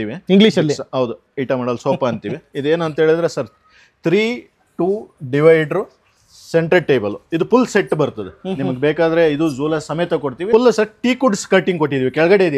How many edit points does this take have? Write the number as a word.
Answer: one